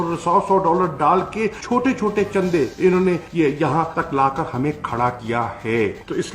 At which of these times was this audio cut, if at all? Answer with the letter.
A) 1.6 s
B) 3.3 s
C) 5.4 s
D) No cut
A